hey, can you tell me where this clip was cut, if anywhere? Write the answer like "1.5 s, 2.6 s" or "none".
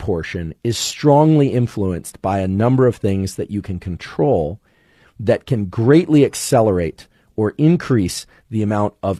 none

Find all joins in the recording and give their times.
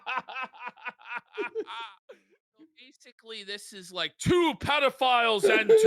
2.7 s

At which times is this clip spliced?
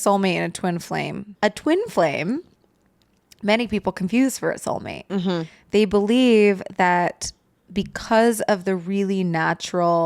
1.2 s

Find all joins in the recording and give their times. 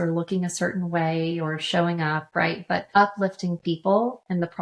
3.0 s

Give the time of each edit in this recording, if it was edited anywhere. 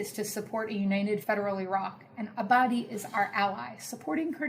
1.2 s

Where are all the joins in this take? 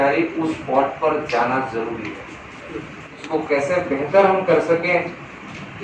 3.2 s

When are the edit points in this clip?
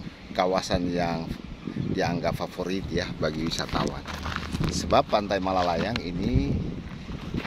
none

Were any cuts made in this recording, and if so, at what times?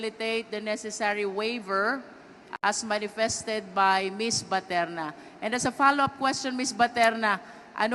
5.8 s

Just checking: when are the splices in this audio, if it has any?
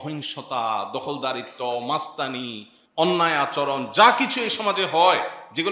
none

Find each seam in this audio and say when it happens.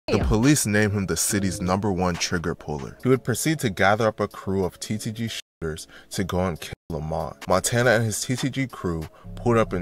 2.9 s, 7.3 s

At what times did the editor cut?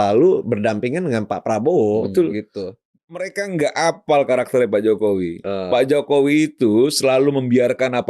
2.9 s

